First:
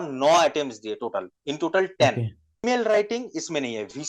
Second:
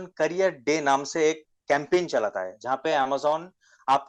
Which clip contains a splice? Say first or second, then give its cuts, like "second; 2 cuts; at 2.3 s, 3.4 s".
first; 1 cut; at 2.6 s